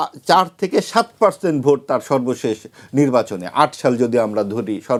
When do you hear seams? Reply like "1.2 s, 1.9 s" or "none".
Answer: none